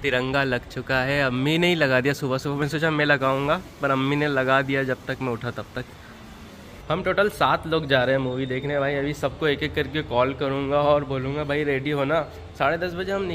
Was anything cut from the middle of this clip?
no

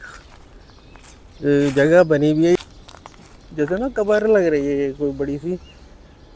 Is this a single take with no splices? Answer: no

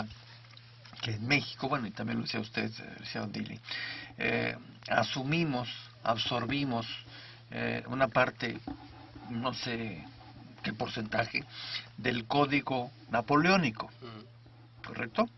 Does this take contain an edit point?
yes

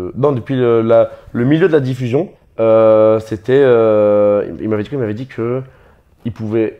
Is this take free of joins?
no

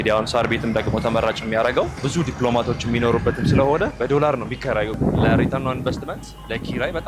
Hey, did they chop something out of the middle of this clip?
yes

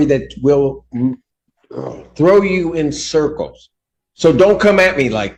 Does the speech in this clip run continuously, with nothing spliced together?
yes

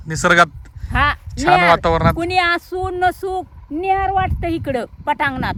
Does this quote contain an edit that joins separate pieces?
no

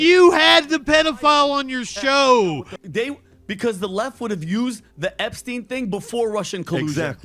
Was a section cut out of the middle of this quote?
yes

